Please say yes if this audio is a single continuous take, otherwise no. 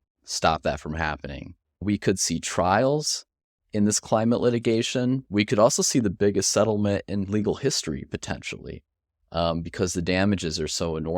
no